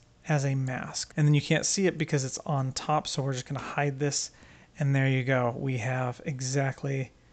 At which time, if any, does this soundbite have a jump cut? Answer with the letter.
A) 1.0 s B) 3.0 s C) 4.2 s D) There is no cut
A